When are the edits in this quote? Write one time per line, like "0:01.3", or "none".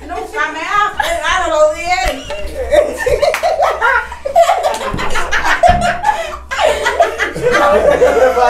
none